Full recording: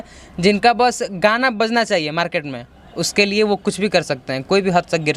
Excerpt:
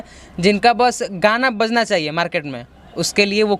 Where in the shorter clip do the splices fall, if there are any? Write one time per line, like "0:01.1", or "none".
none